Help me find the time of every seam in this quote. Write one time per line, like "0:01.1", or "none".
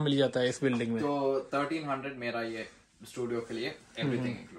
none